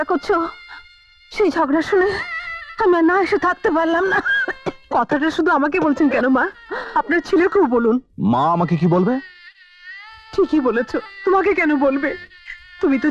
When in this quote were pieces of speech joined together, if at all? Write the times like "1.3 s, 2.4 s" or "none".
none